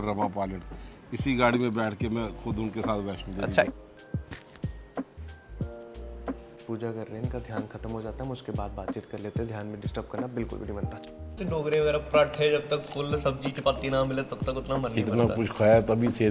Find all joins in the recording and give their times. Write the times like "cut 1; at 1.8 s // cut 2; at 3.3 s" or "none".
cut 1; at 3.7 s // cut 2; at 11.4 s